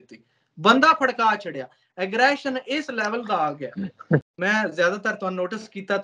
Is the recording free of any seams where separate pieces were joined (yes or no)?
no